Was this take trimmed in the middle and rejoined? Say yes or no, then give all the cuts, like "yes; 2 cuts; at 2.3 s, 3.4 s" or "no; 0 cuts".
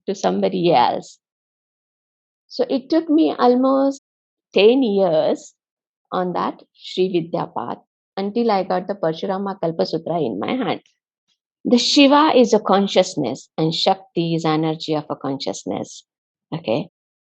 yes; 1 cut; at 11.5 s